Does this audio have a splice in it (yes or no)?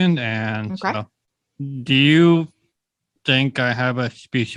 no